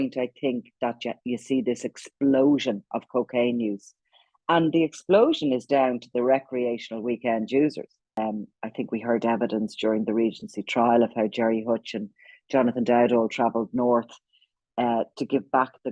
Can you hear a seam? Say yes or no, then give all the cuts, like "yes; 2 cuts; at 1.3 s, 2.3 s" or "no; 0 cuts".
yes; 1 cut; at 8.2 s